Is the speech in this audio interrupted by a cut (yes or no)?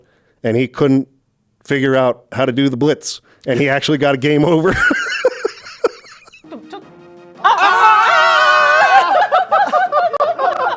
yes